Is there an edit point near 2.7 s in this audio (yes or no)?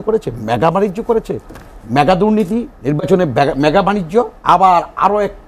yes